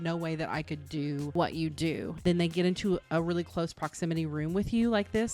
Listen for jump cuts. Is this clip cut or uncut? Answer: cut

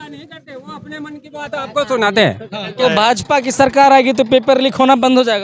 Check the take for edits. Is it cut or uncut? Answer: cut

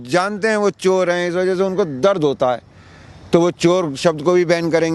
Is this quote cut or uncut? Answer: uncut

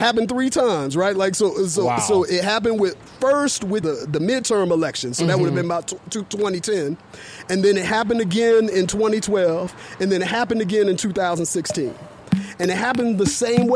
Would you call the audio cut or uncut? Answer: cut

